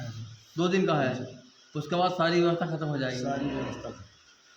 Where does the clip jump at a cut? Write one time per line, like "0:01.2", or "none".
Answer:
none